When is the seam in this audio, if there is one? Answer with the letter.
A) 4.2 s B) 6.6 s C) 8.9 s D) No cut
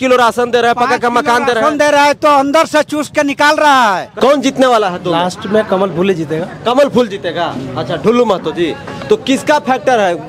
A